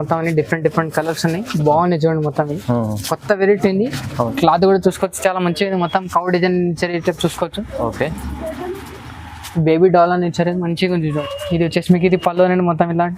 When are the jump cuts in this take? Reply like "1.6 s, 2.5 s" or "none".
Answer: 4.0 s, 11.0 s